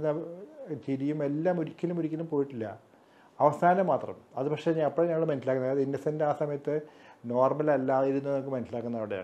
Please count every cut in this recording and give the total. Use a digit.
0